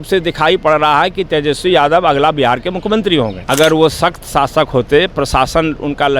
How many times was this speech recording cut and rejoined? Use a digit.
1